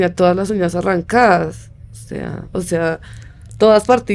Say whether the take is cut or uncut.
uncut